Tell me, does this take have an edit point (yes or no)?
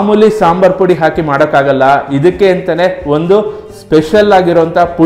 no